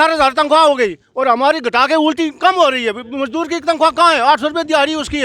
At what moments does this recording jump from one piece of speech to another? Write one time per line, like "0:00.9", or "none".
none